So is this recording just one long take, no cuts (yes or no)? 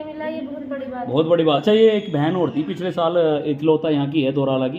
no